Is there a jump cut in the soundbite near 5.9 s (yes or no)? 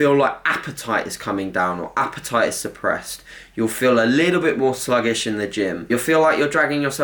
yes